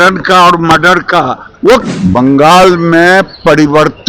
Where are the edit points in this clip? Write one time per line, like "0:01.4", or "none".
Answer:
0:01.8